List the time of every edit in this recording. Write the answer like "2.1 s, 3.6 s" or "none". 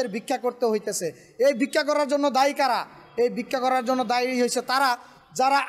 none